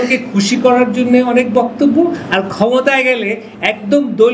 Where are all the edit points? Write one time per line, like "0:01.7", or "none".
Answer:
none